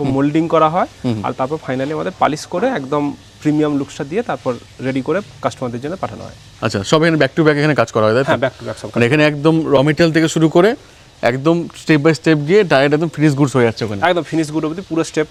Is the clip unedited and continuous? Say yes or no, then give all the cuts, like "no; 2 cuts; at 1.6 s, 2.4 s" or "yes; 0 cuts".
yes; 0 cuts